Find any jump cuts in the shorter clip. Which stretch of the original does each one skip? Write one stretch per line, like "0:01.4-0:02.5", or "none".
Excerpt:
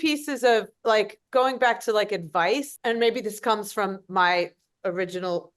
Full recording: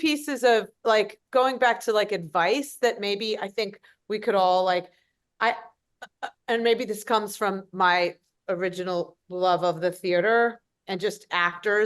0:02.7-0:06.3